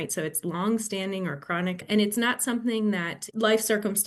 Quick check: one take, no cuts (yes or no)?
no